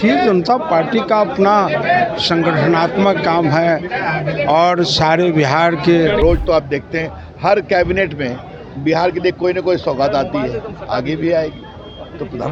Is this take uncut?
no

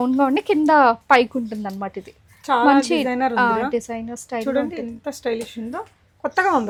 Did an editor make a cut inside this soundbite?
no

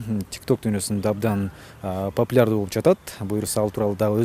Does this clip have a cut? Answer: no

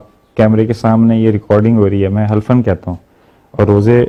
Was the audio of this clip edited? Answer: no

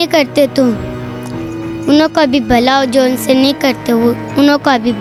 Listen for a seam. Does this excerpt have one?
no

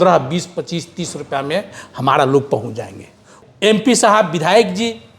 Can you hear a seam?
yes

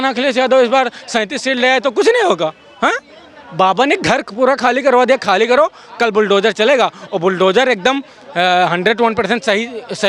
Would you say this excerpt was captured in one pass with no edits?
yes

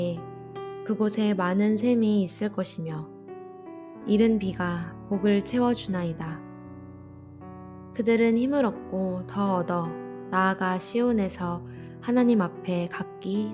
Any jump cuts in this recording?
yes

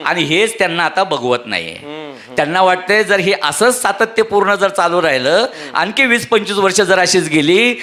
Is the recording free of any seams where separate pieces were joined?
yes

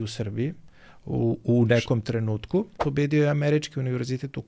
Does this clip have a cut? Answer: yes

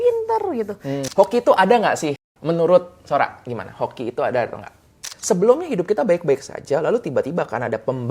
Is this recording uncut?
no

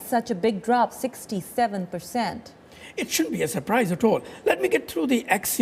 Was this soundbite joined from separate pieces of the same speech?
yes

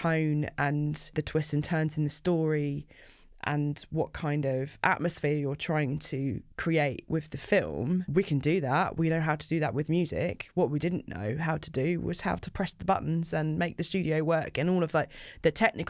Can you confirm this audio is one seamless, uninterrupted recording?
no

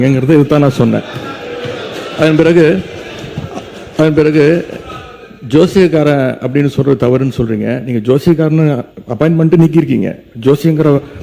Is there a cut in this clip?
no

